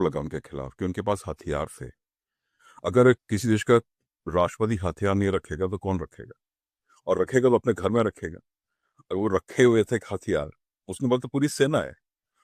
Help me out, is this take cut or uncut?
uncut